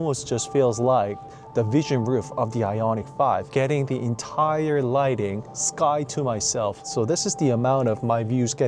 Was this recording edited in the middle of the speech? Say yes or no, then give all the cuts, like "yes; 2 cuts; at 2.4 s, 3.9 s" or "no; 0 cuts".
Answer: no; 0 cuts